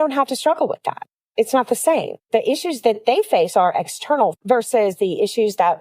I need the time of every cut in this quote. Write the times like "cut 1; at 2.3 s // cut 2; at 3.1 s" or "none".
cut 1; at 4.3 s